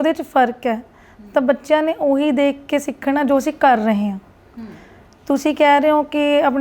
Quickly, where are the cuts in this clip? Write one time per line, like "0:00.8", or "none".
none